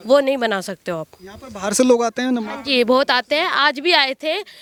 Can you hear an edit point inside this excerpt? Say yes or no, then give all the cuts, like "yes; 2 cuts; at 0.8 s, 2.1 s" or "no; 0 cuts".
no; 0 cuts